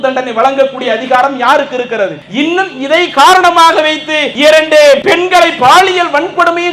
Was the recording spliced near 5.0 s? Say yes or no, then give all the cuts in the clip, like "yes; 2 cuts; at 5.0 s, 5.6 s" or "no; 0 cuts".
yes; 2 cuts; at 2.2 s, 5.0 s